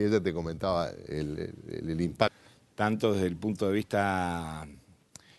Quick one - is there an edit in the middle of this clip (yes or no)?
no